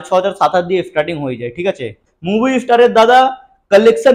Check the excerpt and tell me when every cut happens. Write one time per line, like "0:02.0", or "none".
0:02.1